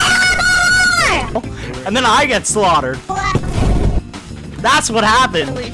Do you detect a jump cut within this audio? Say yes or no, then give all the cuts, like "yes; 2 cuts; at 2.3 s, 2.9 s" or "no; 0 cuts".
yes; 1 cut; at 3.0 s